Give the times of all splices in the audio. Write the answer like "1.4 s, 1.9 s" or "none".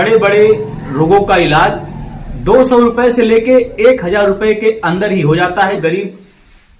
5.8 s